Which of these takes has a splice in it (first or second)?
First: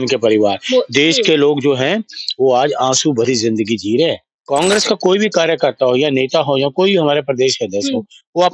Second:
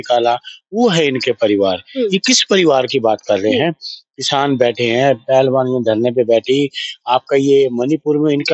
first